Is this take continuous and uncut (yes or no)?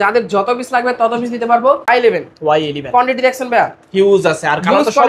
no